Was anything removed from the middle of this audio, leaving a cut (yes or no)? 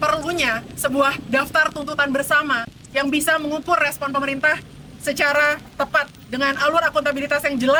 no